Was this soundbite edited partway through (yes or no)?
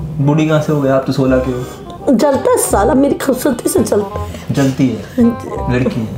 no